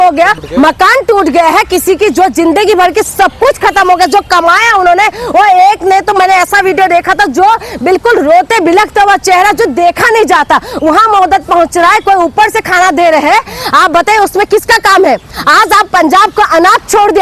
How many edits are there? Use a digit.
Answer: 0